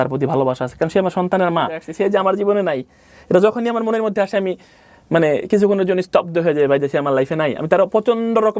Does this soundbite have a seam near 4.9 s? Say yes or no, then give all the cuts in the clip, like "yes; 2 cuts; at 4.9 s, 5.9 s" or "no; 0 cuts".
no; 1 cut; at 1.8 s